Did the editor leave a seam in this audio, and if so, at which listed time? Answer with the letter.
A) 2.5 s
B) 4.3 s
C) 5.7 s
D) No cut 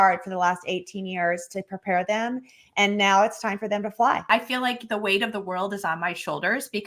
B